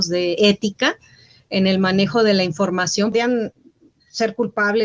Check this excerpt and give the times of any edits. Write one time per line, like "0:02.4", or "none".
0:03.1